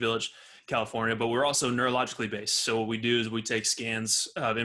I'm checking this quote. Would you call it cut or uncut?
uncut